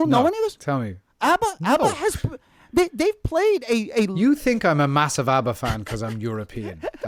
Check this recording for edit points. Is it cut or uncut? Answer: uncut